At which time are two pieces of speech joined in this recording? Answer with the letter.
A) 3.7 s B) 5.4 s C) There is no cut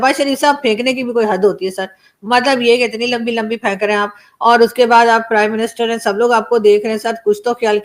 C